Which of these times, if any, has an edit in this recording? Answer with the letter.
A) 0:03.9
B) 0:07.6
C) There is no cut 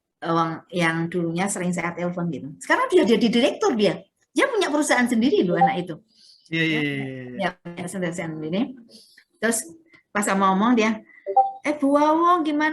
C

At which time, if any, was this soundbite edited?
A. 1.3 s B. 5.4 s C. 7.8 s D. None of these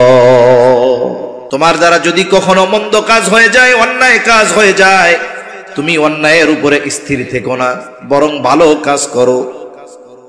A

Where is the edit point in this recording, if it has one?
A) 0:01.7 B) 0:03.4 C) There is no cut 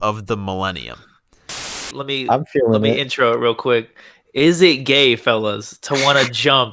A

